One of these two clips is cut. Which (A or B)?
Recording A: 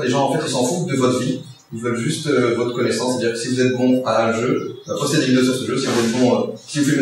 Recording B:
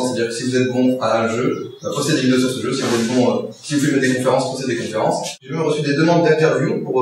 B